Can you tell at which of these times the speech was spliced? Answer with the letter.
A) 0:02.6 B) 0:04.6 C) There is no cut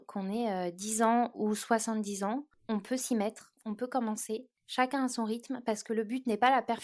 B